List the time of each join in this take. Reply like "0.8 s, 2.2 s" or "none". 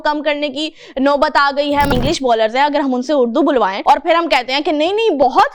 1.9 s, 3.8 s